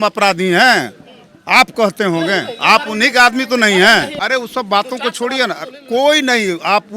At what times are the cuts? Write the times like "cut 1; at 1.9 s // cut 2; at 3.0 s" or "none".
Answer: cut 1; at 4.2 s